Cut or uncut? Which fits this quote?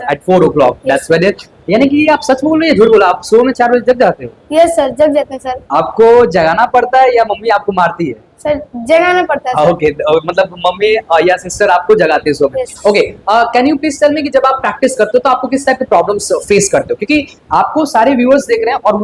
uncut